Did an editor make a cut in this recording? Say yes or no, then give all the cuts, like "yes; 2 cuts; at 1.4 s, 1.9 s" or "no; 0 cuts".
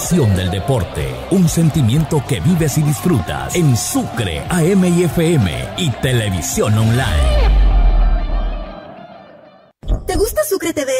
yes; 1 cut; at 10.0 s